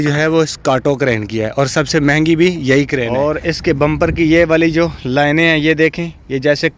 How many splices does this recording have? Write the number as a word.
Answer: one